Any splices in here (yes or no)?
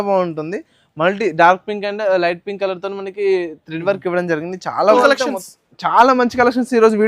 yes